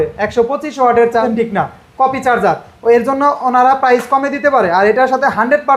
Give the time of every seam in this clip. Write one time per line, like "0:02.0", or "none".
0:01.2